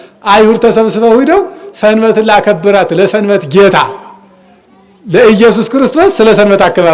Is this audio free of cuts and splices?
yes; 0 cuts

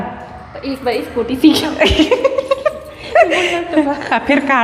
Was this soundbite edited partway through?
no; 0 cuts

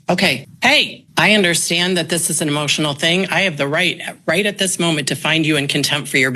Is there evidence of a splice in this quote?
yes; 1 cut; at 1.0 s

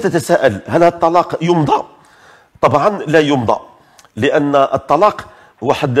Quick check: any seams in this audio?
no; 0 cuts

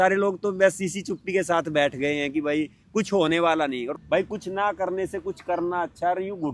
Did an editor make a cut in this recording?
yes; 1 cut; at 3.9 s

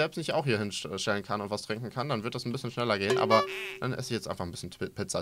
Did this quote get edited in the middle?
no; 0 cuts

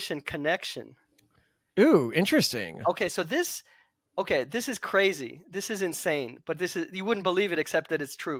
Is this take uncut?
yes; 0 cuts

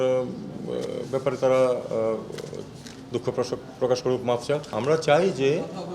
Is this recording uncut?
no; 1 cut; at 4.7 s

